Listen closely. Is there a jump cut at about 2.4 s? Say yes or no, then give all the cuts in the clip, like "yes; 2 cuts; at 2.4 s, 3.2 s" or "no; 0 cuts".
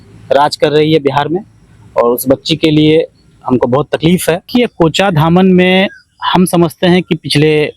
no; 1 cut; at 4.5 s